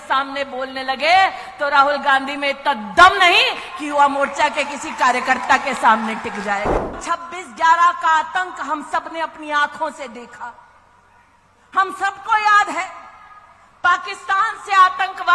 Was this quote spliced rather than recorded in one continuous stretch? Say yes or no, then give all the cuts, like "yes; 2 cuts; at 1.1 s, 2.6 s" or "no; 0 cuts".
yes; 1 cut; at 7.0 s